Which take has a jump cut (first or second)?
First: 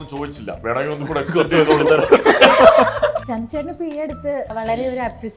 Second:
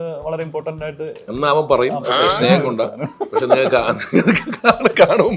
first